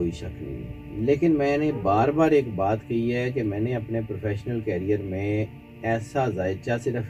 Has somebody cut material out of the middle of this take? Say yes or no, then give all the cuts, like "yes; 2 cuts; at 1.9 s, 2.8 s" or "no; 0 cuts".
no; 0 cuts